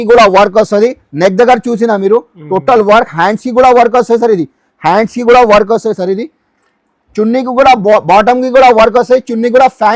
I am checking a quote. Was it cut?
no; 0 cuts

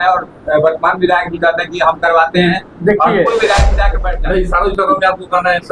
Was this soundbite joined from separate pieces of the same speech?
yes; 1 cut; at 3.9 s

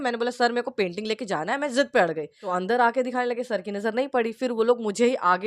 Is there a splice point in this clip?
yes; 1 cut; at 2.3 s

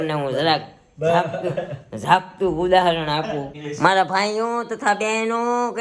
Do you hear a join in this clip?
yes; 1 cut; at 3.6 s

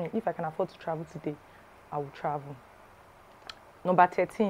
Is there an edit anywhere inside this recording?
no; 0 cuts

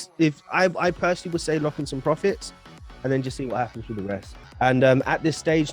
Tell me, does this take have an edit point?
yes; 1 cut; at 4.4 s

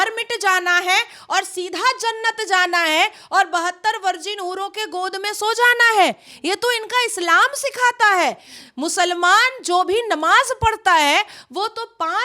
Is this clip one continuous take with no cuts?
yes; 0 cuts

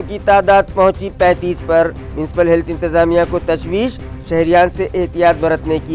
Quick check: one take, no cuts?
yes; 0 cuts

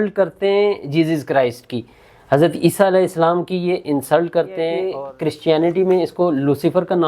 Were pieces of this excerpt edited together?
yes; 1 cut; at 4.8 s

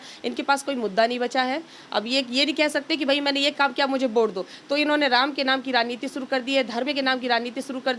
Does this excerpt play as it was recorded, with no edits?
yes; 0 cuts

